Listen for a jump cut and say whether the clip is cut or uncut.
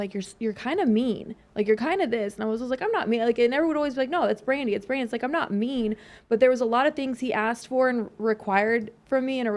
uncut